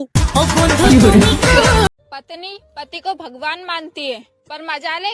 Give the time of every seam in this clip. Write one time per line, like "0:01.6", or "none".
0:01.9